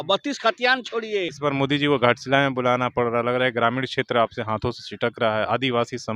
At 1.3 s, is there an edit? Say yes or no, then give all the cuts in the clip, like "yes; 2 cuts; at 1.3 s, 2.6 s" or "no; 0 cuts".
yes; 1 cut; at 1.3 s